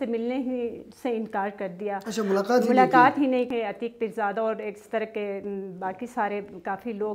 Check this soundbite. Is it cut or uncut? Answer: cut